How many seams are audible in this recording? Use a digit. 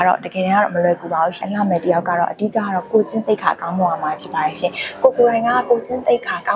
1